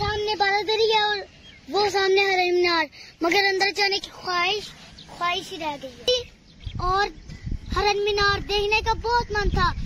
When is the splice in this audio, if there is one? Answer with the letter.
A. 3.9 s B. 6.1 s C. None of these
B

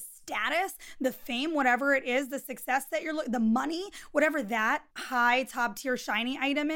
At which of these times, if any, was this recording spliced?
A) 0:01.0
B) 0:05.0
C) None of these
B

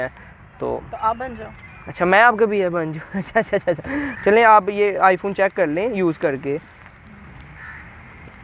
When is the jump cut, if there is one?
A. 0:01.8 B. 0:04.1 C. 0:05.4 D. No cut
B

